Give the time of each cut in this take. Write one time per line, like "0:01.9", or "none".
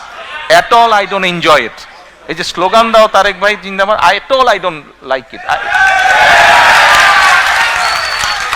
none